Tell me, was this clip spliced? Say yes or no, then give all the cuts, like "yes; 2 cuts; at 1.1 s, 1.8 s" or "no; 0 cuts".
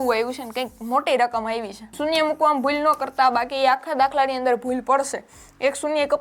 yes; 1 cut; at 1.8 s